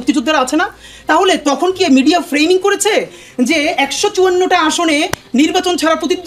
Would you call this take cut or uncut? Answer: uncut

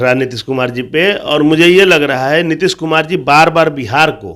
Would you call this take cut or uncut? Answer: uncut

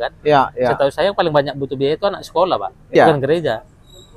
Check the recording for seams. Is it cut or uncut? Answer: cut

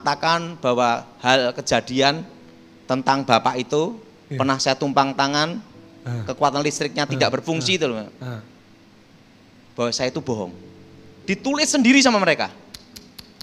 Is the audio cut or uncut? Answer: uncut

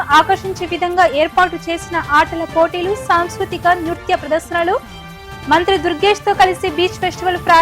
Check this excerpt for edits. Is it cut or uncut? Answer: uncut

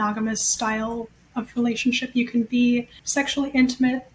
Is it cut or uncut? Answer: cut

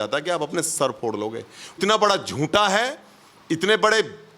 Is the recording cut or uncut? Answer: cut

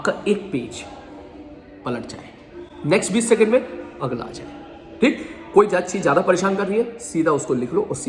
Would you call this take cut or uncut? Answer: uncut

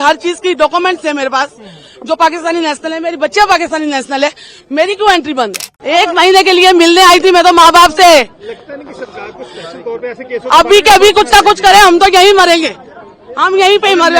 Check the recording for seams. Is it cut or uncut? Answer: cut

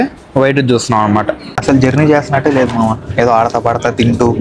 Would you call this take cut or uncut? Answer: cut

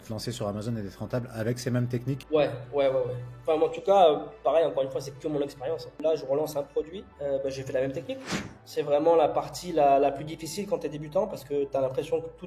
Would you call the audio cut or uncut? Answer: cut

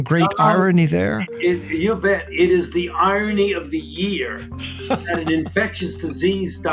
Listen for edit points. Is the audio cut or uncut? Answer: uncut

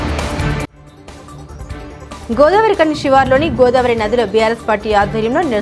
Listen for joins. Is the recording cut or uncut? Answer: uncut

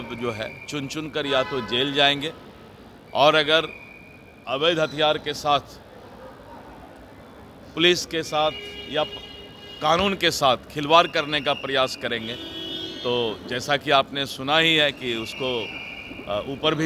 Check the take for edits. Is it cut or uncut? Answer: uncut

